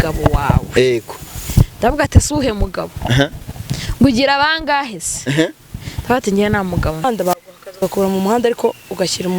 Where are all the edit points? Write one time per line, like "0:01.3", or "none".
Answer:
0:07.0

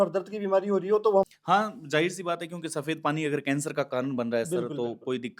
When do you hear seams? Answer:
0:01.2

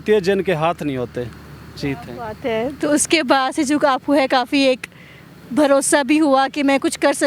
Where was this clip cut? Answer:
none

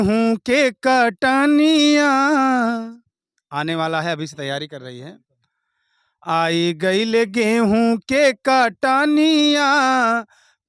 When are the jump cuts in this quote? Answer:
none

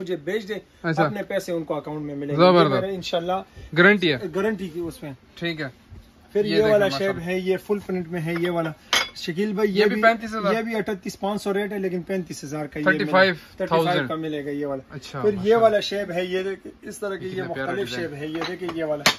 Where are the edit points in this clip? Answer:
none

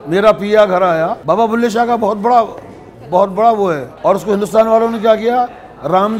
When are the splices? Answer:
0:01.2
0:03.9

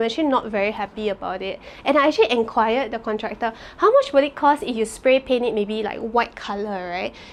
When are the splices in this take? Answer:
none

